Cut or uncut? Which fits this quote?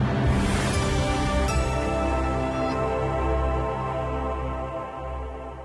cut